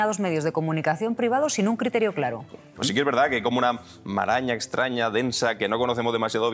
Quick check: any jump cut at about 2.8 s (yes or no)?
yes